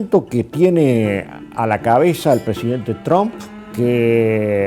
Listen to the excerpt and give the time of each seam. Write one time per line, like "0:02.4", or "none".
0:02.5